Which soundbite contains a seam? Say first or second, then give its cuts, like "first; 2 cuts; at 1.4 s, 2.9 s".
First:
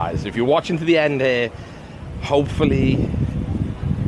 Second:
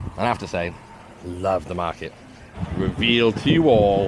second; 1 cut; at 2.6 s